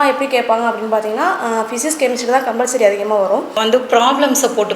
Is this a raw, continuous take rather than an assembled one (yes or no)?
no